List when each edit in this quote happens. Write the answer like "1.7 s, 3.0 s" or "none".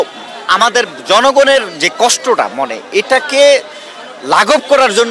none